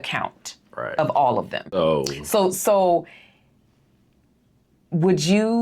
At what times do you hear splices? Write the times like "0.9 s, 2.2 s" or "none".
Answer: 1.8 s